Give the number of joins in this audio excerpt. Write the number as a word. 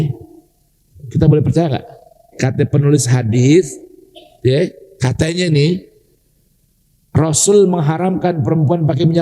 one